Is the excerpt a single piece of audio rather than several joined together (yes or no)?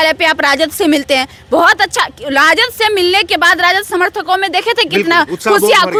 yes